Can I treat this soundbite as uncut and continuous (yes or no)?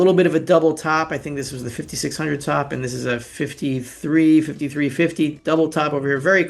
no